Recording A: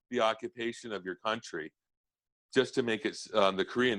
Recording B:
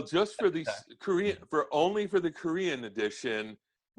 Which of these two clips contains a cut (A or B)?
A